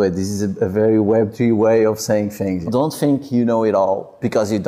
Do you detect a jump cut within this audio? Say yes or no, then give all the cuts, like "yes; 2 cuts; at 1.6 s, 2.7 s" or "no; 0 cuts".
yes; 1 cut; at 2.6 s